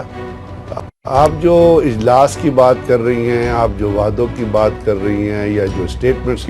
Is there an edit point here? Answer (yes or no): yes